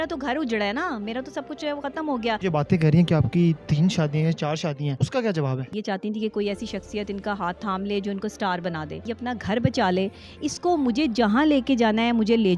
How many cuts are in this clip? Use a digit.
4